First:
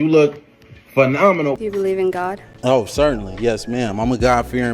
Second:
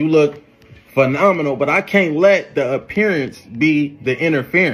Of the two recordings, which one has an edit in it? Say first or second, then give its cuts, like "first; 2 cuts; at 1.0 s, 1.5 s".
first; 1 cut; at 1.6 s